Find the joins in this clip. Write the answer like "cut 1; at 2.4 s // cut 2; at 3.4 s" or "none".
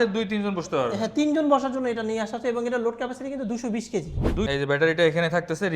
cut 1; at 4.2 s